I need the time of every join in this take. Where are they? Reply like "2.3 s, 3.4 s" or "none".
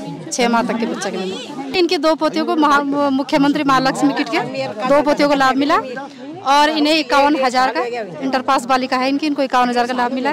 1.6 s